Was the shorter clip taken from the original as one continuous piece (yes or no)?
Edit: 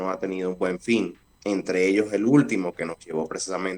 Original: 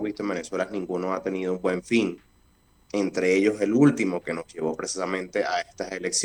no